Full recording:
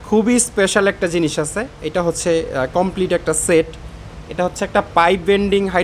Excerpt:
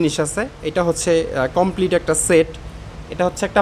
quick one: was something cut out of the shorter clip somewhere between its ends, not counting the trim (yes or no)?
no